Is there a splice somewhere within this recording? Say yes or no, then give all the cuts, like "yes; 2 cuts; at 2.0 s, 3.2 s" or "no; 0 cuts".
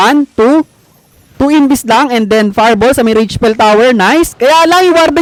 no; 0 cuts